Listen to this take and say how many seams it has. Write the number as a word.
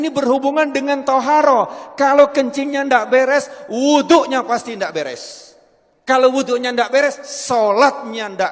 zero